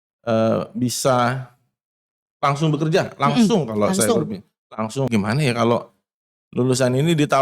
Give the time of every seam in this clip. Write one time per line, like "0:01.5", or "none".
0:05.1